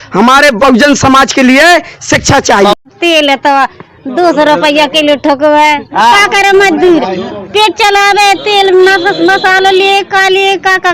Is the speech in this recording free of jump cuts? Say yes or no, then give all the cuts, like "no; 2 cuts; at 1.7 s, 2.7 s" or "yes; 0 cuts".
no; 1 cut; at 2.8 s